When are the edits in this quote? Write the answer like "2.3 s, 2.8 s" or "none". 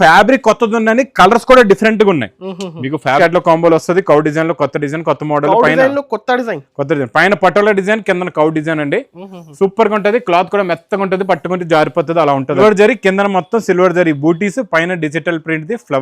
3.2 s, 12.6 s